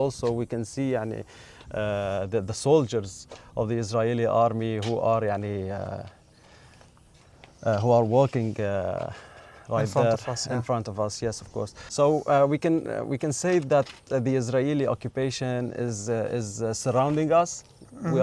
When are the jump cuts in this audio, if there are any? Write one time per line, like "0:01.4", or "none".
0:11.8